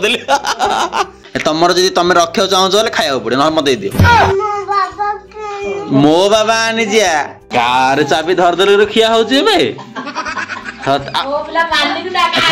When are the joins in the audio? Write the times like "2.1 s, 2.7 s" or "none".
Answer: 1.2 s, 7.4 s